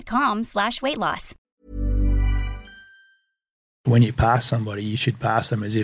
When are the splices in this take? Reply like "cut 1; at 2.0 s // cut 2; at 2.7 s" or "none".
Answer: cut 1; at 1.5 s // cut 2; at 3.8 s